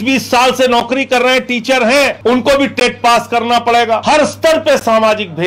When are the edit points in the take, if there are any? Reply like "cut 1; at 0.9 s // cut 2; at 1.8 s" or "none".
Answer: cut 1; at 2.2 s // cut 2; at 4.0 s